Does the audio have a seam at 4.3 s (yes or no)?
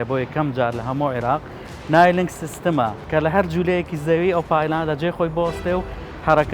no